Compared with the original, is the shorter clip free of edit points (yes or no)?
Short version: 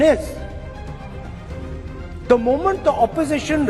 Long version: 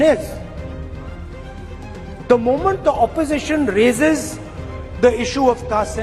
yes